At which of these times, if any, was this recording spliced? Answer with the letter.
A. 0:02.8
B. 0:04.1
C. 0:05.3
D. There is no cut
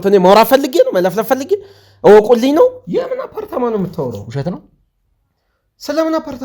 A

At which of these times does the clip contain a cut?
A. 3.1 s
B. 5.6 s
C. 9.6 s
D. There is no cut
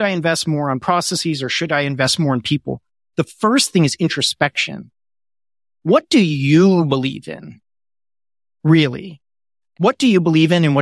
C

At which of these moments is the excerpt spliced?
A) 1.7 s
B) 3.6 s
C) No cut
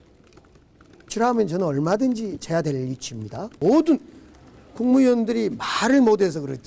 B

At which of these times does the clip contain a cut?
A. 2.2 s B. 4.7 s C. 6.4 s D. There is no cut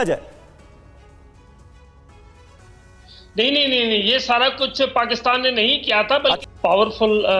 C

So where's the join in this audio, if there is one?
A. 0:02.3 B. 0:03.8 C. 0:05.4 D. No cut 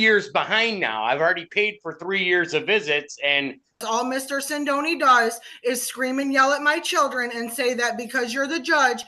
B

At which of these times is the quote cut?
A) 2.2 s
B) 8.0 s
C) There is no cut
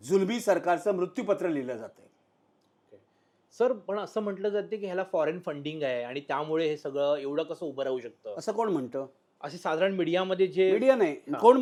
C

